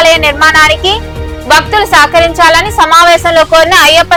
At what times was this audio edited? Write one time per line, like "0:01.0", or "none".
none